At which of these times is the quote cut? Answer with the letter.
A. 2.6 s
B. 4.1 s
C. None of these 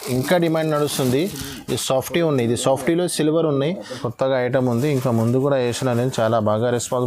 B